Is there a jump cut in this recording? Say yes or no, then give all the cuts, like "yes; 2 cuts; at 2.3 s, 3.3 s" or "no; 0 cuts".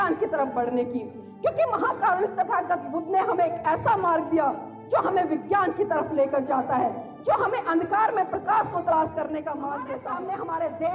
yes; 1 cut; at 9.9 s